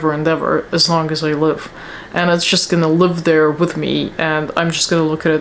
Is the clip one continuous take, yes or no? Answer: yes